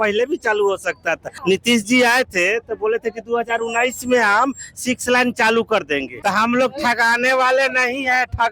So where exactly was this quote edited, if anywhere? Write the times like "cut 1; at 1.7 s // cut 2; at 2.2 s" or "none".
cut 1; at 1.3 s // cut 2; at 6.1 s